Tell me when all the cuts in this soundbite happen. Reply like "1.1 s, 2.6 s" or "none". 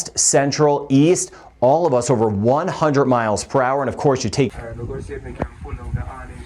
4.5 s